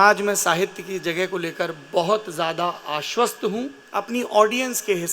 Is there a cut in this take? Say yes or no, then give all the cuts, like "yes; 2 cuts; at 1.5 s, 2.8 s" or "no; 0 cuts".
yes; 1 cut; at 3.8 s